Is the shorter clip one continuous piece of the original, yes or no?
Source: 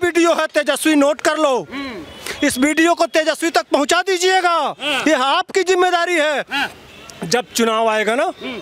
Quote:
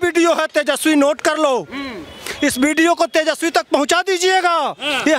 yes